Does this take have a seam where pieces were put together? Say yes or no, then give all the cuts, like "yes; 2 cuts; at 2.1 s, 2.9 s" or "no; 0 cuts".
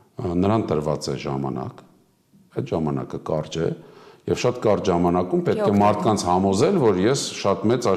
no; 0 cuts